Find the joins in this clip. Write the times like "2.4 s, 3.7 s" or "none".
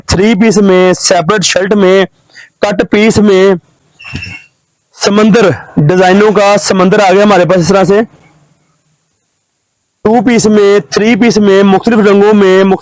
none